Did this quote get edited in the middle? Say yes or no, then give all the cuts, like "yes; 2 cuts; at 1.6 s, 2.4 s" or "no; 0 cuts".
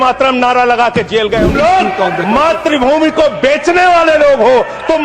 yes; 1 cut; at 1.5 s